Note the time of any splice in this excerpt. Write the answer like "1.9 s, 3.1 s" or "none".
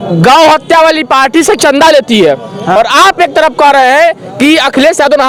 none